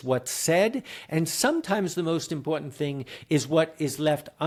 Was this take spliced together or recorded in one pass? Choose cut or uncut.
uncut